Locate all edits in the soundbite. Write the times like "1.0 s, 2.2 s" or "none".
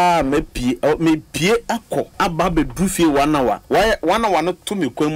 2.1 s